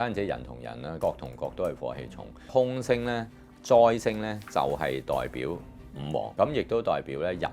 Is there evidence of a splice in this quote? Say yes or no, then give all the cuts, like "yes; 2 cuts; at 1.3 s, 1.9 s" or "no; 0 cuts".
yes; 3 cuts; at 1.0 s, 2.5 s, 6.3 s